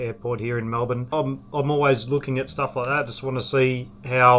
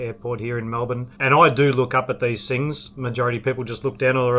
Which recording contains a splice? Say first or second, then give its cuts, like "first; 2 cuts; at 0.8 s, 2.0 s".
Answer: first; 1 cut; at 1.1 s